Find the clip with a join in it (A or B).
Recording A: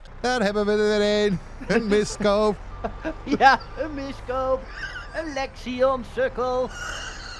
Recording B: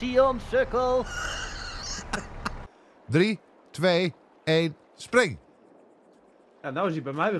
B